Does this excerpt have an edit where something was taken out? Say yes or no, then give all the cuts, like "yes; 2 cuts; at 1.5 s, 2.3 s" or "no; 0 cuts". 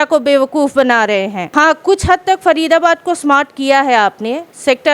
yes; 1 cut; at 1.4 s